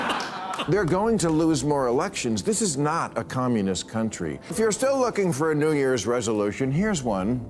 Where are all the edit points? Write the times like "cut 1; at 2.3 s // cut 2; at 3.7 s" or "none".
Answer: cut 1; at 4.4 s